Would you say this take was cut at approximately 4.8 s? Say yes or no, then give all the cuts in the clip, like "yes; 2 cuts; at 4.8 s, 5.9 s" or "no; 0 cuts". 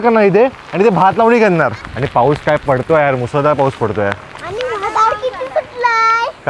no; 1 cut; at 1.9 s